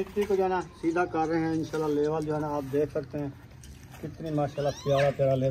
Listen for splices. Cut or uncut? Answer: uncut